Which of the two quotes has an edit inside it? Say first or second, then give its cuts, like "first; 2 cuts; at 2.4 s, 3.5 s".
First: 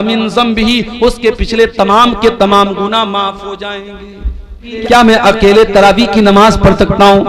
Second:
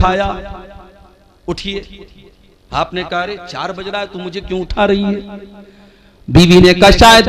first; 1 cut; at 4.7 s